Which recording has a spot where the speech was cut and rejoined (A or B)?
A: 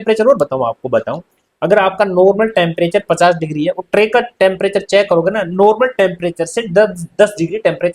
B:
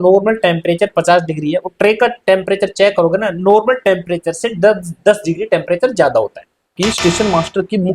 B